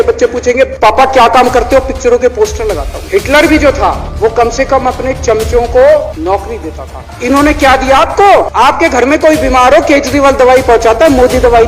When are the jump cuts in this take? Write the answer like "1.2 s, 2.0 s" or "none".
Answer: 3.1 s, 8.5 s